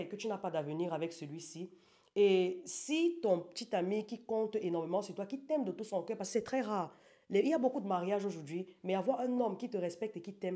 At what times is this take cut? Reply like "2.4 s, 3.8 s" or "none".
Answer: none